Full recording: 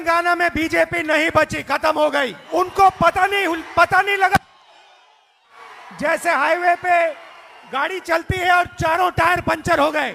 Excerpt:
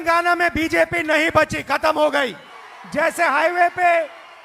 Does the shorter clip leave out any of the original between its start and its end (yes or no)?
yes